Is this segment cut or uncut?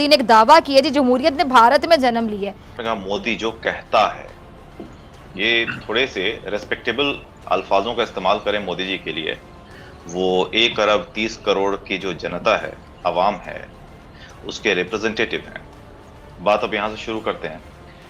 cut